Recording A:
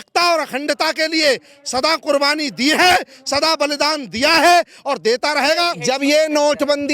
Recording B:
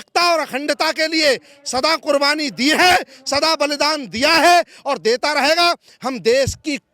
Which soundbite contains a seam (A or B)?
A